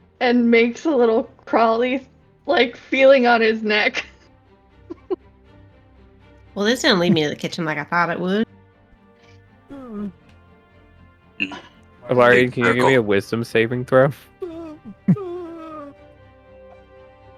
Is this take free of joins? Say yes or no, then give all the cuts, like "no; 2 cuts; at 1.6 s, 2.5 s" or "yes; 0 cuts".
no; 1 cut; at 15.9 s